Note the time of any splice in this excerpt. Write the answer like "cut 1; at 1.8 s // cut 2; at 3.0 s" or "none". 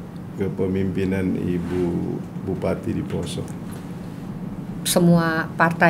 none

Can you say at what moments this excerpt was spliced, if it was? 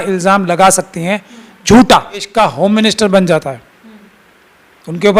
cut 1; at 2.3 s

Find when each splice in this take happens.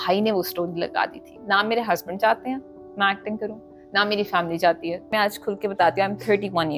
cut 1; at 1.3 s // cut 2; at 5.1 s

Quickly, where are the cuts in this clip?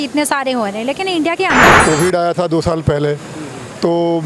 cut 1; at 1.8 s

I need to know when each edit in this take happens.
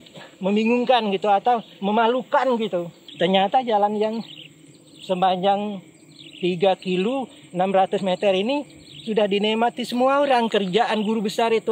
cut 1; at 3.0 s

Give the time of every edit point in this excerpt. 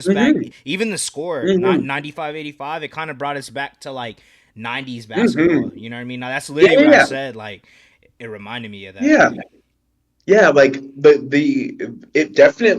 none

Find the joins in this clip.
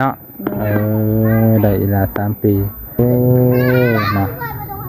cut 1; at 3.0 s

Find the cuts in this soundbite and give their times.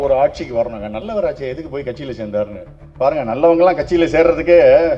cut 1; at 1.0 s

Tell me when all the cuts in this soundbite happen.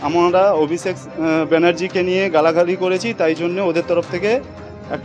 none

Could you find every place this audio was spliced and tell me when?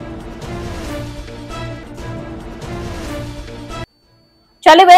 none

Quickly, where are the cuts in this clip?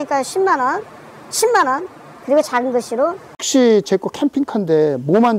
cut 1; at 3.4 s

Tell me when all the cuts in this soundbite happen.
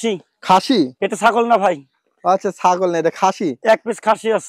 none

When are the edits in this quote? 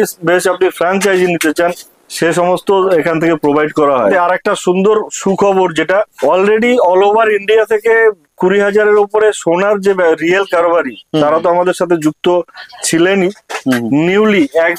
cut 1; at 4.1 s // cut 2; at 6.1 s

